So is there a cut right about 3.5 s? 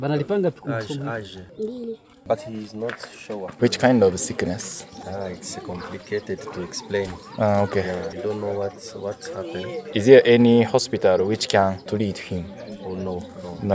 yes; 5 cuts; at 1.4 s, 3.5 s, 5.0 s, 8.1 s, 9.9 s

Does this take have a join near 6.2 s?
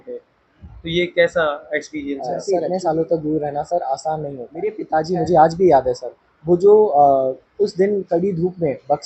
no; 2 cuts; at 2.4 s, 4.8 s

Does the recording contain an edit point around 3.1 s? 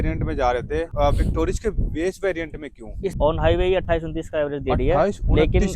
yes; 2 cuts; at 0.9 s, 3.1 s

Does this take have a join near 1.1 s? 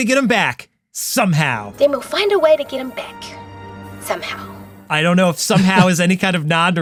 no; 0 cuts

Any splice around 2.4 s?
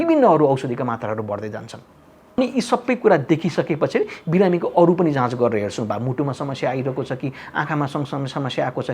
yes; 1 cut; at 2.4 s

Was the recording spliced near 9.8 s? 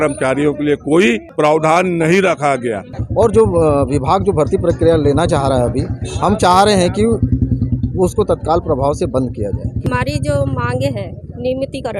yes; 3 cuts; at 1.3 s, 3.0 s, 9.8 s

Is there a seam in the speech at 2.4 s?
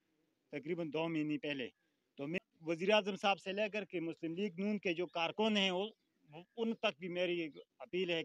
yes; 1 cut; at 2.4 s

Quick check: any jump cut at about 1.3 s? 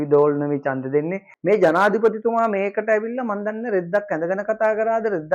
yes; 1 cut; at 1.3 s

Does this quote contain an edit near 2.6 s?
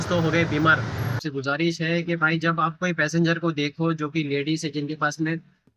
no; 1 cut; at 1.2 s

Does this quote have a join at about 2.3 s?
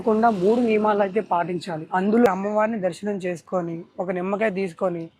yes; 1 cut; at 2.3 s

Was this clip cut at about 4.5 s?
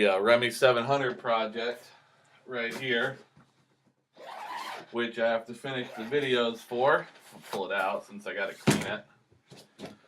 yes; 1 cut; at 4.5 s

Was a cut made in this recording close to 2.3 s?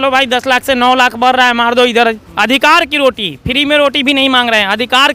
yes; 1 cut; at 2.3 s

